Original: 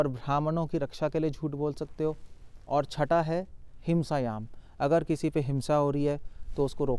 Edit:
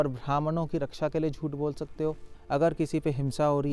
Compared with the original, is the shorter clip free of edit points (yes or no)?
no